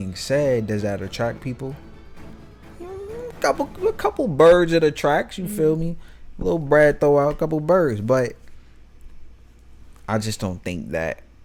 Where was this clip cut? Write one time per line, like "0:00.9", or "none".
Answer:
none